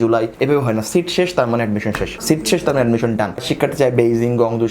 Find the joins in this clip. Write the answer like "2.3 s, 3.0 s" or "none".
3.4 s